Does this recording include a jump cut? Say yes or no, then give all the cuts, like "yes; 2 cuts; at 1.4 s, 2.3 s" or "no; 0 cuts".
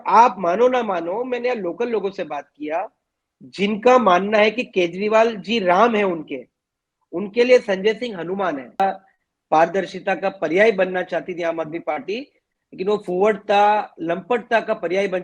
yes; 1 cut; at 8.8 s